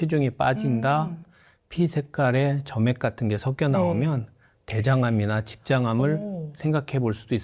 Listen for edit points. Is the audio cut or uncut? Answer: uncut